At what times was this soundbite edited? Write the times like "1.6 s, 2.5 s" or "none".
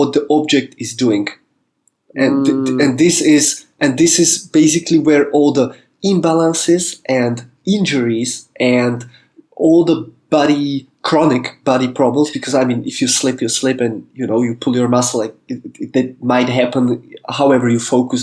none